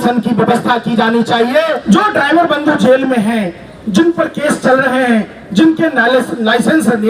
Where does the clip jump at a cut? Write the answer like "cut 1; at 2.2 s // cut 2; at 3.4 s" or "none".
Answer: cut 1; at 1.8 s